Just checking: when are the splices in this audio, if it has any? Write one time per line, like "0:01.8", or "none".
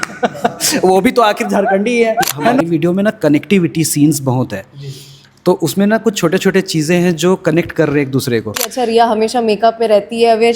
0:02.6
0:08.7

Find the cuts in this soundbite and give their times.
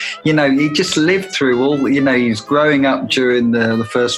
none

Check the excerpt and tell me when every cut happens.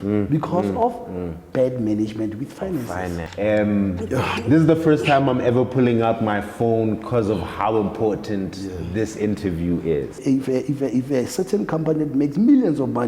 0:03.2
0:10.2

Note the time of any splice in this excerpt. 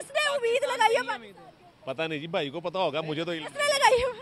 none

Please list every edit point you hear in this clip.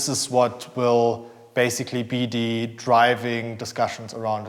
none

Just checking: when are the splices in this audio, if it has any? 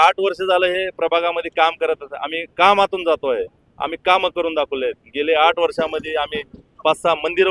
none

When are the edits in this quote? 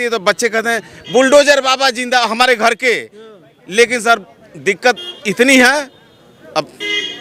none

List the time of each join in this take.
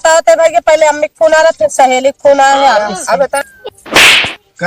0:03.4

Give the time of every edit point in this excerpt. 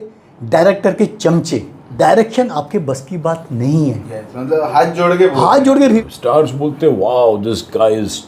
0:01.8
0:06.0

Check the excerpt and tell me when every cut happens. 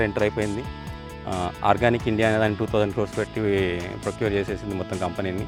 none

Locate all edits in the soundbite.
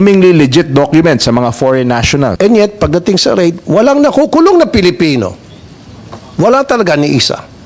0:02.3

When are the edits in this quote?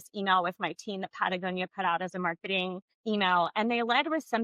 0:02.9

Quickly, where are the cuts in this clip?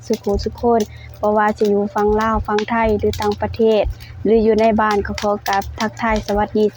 none

